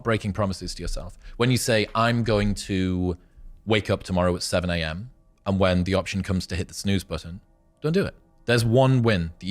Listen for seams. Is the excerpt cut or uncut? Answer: cut